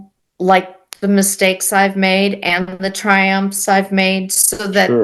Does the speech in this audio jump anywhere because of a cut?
no; 0 cuts

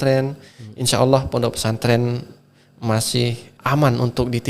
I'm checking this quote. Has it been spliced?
yes; 1 cut; at 3.5 s

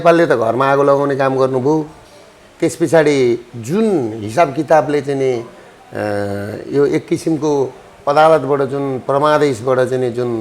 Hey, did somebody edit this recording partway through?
no; 0 cuts

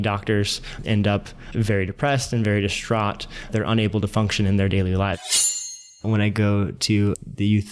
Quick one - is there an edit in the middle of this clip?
yes; 2 cuts; at 0.8 s, 5.7 s

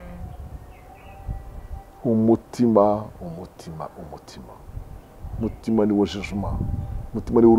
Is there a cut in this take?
no; 0 cuts

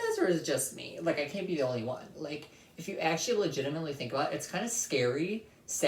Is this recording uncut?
yes; 0 cuts

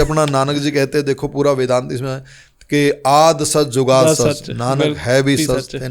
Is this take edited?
no; 0 cuts

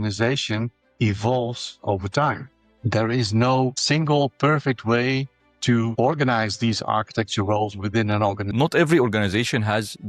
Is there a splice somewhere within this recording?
yes; 2 cuts; at 2.7 s, 8.5 s

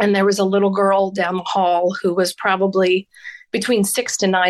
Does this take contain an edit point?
no; 0 cuts

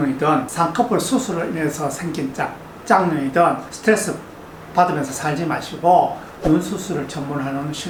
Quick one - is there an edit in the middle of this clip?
no; 0 cuts

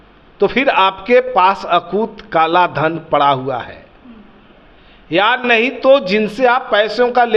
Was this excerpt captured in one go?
yes; 0 cuts

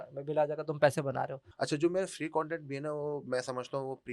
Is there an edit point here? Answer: yes; 1 cut; at 1.4 s

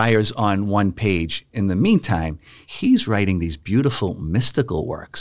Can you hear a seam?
no; 0 cuts

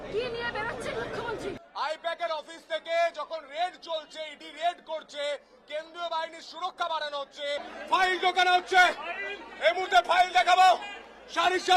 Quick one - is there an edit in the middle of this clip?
yes; 2 cuts; at 1.6 s, 7.7 s

